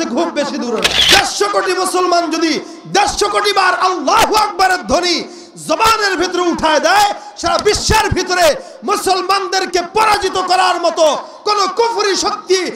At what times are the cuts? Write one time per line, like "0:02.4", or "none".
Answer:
0:01.0